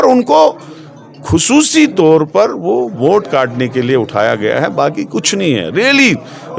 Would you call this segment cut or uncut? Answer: uncut